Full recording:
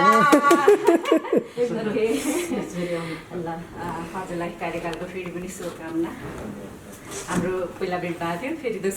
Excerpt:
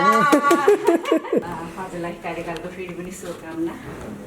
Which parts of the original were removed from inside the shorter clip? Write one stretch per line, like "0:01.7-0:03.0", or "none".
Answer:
0:01.5-0:03.9